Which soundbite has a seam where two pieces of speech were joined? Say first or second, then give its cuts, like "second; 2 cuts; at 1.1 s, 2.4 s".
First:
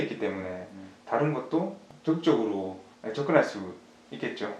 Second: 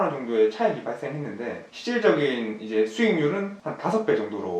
second; 1 cut; at 1.7 s